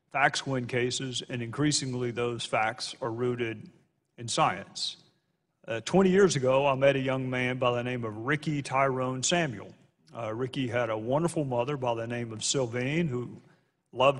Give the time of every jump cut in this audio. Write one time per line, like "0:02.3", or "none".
none